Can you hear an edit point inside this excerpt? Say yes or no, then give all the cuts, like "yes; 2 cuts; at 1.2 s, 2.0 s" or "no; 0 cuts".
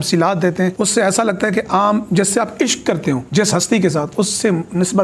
yes; 2 cuts; at 0.7 s, 3.2 s